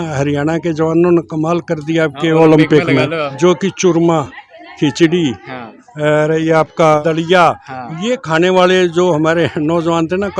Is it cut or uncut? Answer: cut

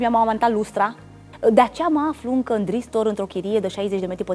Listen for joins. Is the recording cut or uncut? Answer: cut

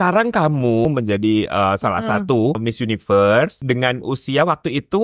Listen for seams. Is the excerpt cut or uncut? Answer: cut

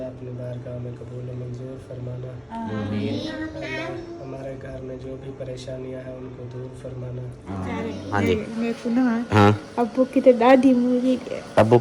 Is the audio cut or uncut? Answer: cut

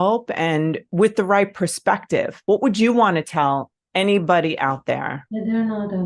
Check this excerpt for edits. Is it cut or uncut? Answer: cut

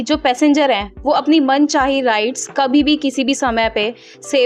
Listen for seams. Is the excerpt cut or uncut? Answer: uncut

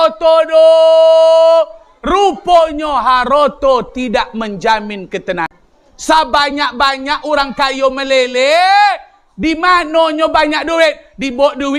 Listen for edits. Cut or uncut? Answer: cut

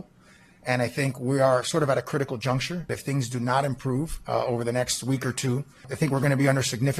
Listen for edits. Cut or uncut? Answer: cut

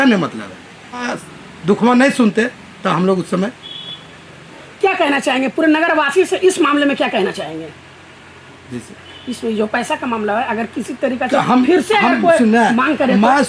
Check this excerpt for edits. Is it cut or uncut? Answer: cut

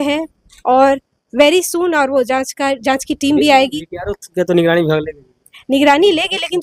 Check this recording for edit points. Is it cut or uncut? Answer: uncut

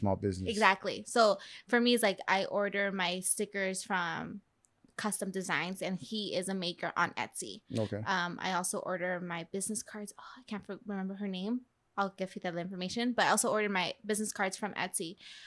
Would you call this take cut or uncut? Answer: uncut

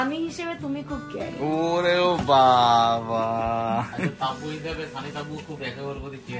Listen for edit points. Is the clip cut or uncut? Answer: uncut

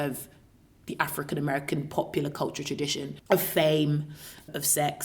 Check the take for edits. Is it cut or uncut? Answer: cut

